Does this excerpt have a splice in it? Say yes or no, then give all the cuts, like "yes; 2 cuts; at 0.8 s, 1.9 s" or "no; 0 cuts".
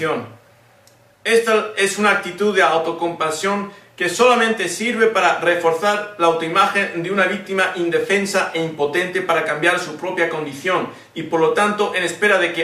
yes; 1 cut; at 8.7 s